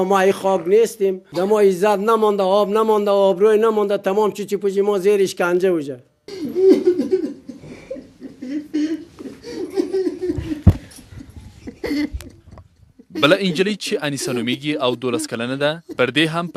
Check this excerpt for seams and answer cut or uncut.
uncut